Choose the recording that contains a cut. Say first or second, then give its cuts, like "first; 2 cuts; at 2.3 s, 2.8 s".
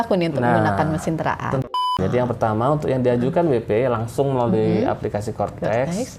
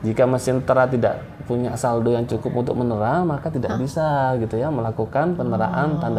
first; 1 cut; at 1.7 s